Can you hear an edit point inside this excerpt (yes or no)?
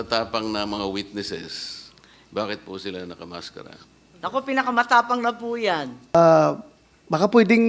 yes